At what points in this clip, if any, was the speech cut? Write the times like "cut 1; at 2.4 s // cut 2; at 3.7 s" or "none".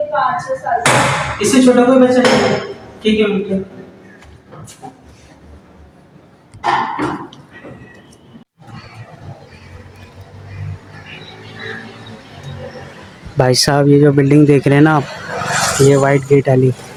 none